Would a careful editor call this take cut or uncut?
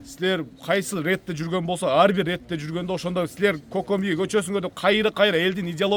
uncut